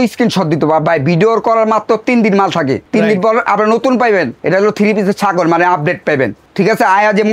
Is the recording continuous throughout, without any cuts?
no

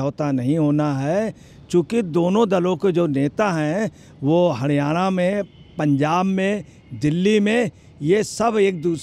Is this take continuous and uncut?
yes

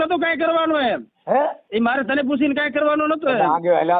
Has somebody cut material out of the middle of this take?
yes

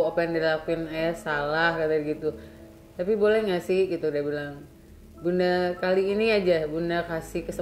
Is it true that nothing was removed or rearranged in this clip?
yes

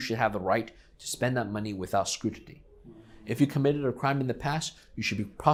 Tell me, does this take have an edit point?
no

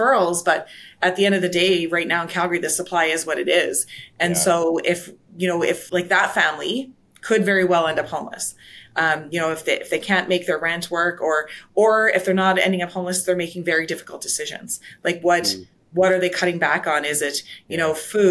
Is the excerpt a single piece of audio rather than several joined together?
yes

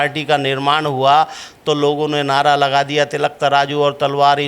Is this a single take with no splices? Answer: yes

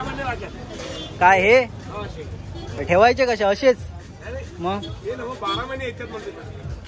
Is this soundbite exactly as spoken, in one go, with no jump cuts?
yes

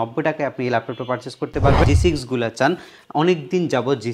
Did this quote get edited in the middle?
yes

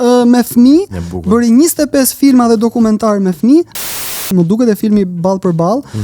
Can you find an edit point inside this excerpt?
yes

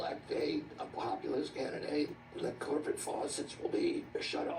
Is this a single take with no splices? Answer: no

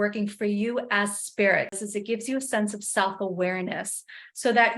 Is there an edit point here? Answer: yes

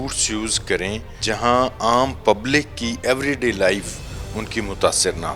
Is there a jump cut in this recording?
yes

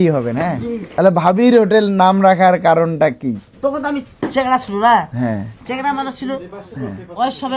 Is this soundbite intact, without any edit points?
yes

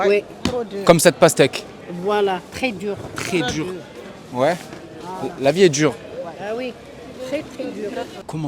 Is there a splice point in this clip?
no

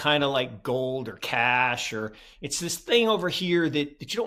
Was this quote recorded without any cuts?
yes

